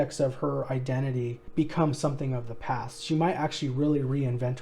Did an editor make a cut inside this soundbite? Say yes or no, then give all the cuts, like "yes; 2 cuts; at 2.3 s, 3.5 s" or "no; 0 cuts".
yes; 1 cut; at 1.4 s